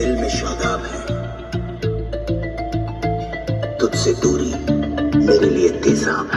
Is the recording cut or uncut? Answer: uncut